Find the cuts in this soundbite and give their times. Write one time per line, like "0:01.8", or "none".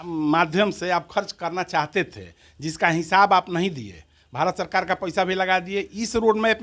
none